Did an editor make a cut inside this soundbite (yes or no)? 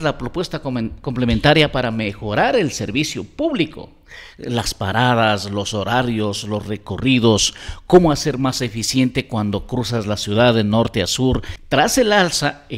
yes